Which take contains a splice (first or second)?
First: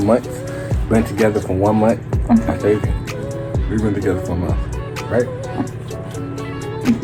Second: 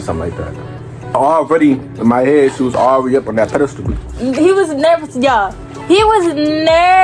second